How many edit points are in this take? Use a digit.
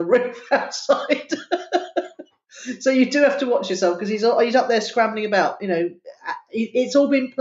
0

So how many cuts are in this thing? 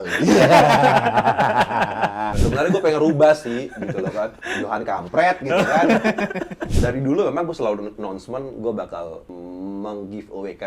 2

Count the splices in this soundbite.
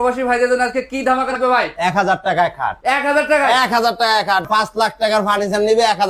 2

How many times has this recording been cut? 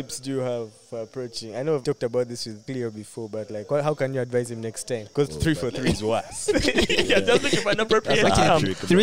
3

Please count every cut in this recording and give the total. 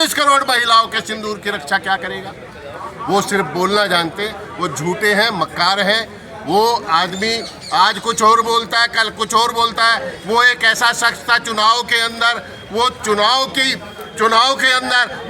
0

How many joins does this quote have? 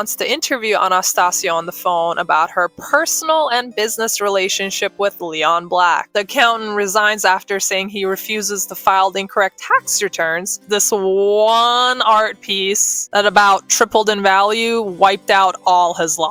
2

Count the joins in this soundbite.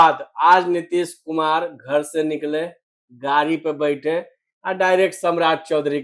0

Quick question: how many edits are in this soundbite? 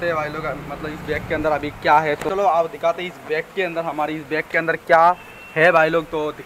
1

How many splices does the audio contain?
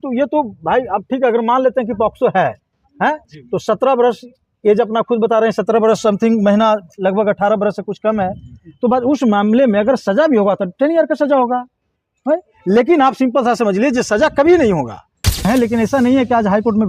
1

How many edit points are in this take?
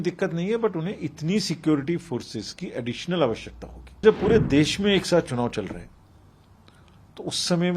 1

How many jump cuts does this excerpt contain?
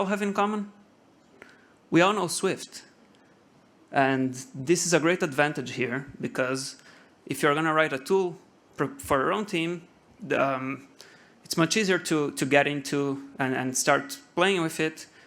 0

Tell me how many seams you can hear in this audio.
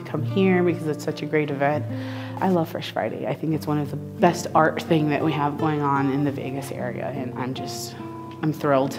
2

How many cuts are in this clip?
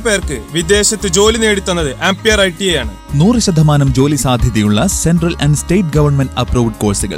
0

